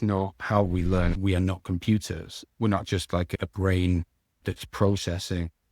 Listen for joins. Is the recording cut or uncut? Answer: cut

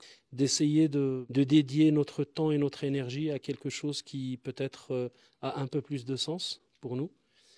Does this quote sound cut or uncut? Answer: uncut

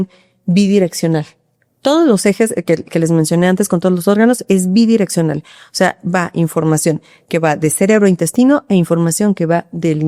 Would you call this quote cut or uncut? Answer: uncut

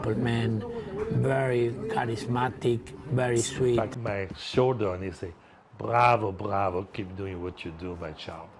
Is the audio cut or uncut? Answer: cut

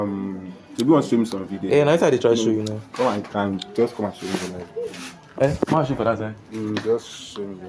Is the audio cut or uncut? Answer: uncut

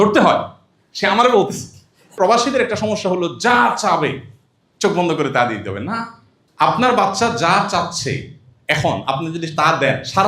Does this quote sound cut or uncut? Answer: cut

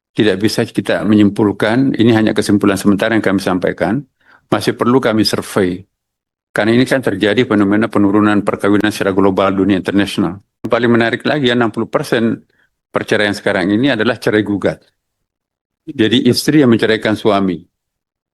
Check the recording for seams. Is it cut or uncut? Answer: cut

